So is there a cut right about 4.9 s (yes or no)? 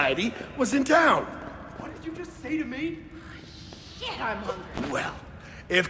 yes